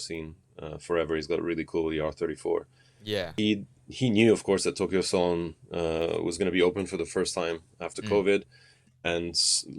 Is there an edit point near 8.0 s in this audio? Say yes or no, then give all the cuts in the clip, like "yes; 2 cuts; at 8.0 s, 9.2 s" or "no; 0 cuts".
no; 1 cut; at 3.3 s